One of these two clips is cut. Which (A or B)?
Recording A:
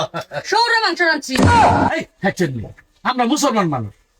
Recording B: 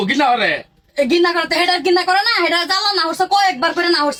A